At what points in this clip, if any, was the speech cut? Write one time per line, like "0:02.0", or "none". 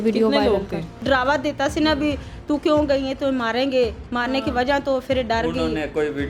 0:01.0